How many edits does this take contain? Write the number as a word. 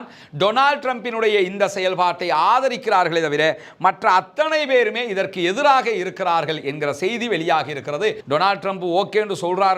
one